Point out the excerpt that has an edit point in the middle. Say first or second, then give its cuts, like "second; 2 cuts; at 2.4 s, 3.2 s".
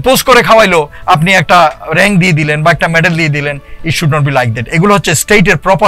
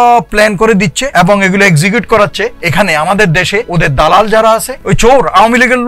second; 4 cuts; at 1.0 s, 2.6 s, 3.7 s, 4.7 s